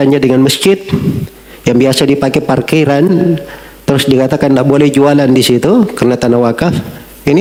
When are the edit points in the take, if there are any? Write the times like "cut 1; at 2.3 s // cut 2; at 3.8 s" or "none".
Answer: none